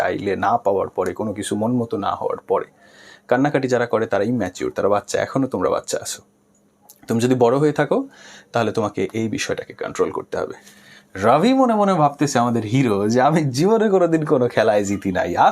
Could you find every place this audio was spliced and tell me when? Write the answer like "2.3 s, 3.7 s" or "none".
10.6 s